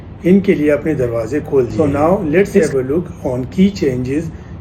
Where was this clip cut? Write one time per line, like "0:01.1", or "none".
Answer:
0:01.7